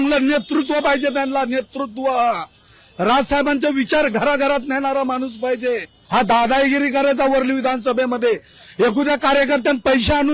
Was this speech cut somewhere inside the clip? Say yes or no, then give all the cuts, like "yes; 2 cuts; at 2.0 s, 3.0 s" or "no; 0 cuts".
yes; 1 cut; at 5.9 s